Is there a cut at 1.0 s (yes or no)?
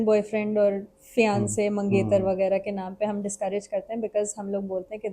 no